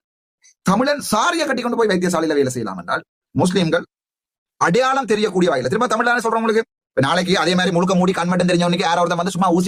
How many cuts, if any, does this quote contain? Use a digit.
0